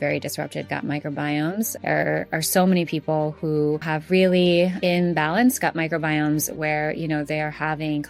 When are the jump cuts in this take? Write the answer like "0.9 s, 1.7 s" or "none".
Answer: 1.7 s, 3.9 s, 4.8 s